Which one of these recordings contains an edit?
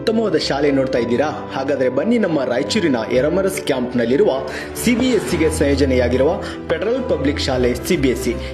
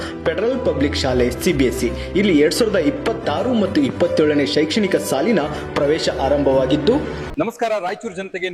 second; 1 cut; at 7.2 s

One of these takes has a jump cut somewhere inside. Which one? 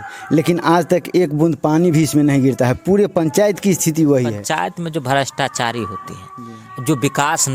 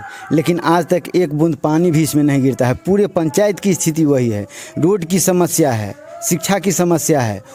first; 1 cut; at 4.4 s

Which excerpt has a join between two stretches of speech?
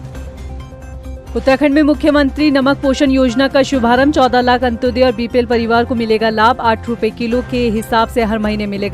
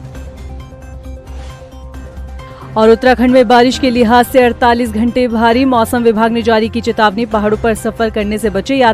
second; 1 cut; at 1.2 s

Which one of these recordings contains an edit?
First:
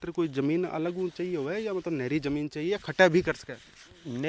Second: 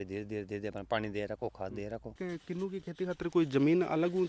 second; 1 cut; at 2.2 s

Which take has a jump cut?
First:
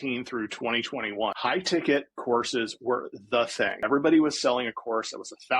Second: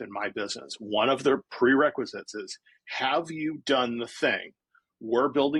first; 2 cuts; at 1.4 s, 3.8 s

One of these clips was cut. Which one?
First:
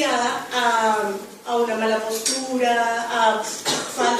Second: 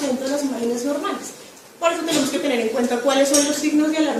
first; 1 cut; at 1.7 s

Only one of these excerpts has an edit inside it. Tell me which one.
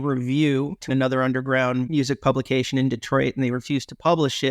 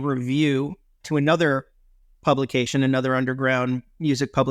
first; 2 cuts; at 0.9 s, 1.9 s

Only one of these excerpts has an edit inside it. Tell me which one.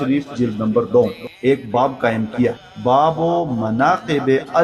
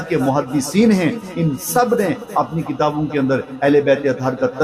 first; 2 cuts; at 1.3 s, 2.8 s

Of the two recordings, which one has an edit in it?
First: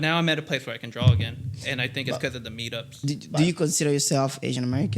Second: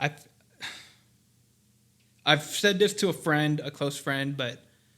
first; 1 cut; at 3.0 s

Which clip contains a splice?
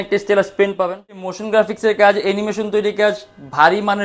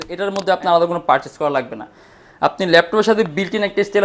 first; 1 cut; at 1.3 s

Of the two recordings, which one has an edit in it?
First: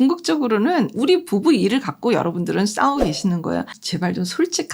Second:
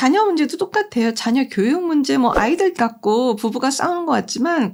first; 2 cuts; at 0.9 s, 3.8 s

